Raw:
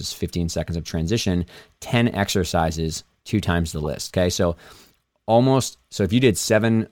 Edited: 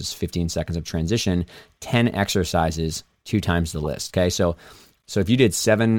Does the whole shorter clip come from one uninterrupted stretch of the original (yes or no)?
no